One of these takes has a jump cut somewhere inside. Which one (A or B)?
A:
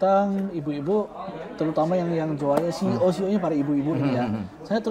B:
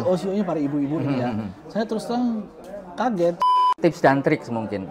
B